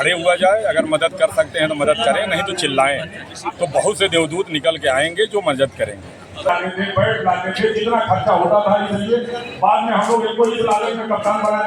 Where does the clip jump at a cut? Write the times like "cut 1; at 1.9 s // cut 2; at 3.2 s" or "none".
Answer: cut 1; at 6.5 s